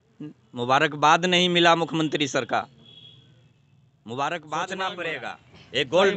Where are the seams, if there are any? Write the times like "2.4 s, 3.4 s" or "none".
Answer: 4.7 s